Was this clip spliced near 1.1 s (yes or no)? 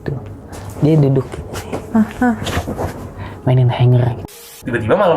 no